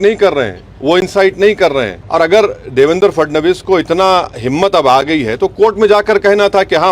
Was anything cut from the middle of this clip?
yes; 1 cut; at 2.0 s

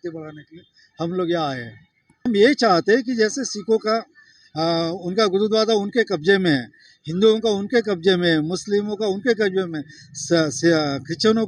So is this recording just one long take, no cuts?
no; 1 cut; at 2.3 s

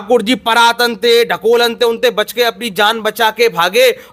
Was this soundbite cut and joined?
no; 0 cuts

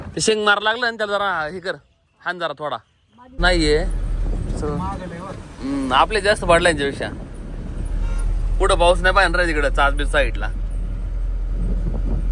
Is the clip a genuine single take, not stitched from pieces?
no; 1 cut; at 3.4 s

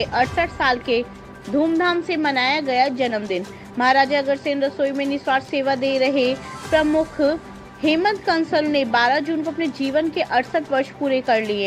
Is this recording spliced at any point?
no; 0 cuts

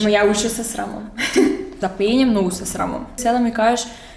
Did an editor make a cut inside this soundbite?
yes; 2 cuts; at 1.8 s, 3.2 s

